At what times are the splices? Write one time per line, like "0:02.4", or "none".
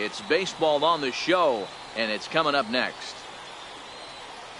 0:02.9